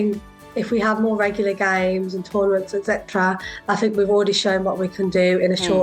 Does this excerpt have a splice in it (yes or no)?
no